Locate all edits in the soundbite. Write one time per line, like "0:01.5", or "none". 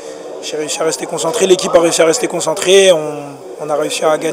none